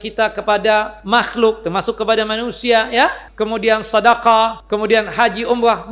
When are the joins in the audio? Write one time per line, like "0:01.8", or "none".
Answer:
0:01.0
0:03.3
0:04.6